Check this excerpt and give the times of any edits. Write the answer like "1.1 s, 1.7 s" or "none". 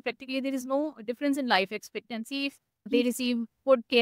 2.9 s